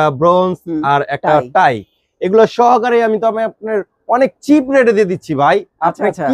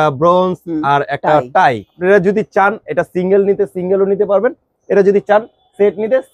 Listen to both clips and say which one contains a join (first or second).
second